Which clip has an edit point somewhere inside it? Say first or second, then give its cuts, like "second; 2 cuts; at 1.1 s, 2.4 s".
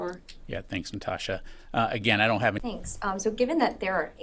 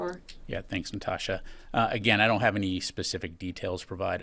second; 1 cut; at 2.6 s